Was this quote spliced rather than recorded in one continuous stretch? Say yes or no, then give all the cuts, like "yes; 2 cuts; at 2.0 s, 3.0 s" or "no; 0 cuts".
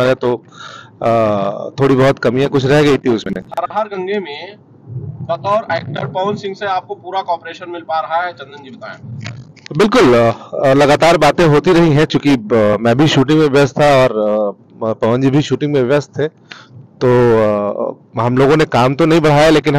yes; 1 cut; at 3.4 s